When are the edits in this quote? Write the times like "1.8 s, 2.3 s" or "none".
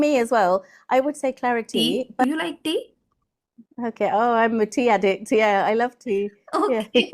2.2 s